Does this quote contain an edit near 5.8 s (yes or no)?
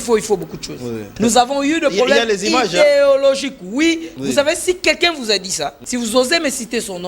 yes